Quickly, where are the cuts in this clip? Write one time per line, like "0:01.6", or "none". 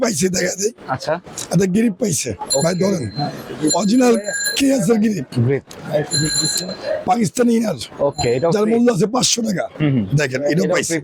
none